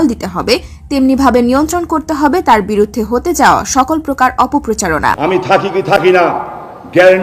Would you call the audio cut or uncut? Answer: cut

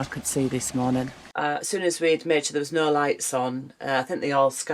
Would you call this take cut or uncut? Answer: cut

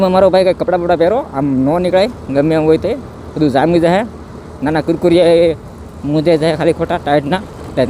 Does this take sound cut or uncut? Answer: uncut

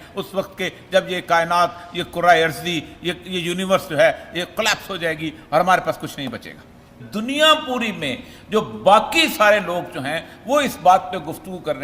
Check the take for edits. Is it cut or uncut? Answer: cut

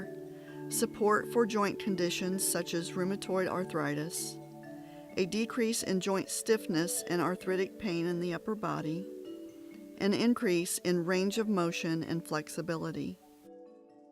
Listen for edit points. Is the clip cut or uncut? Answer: cut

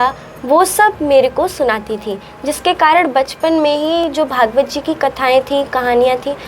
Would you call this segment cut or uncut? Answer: uncut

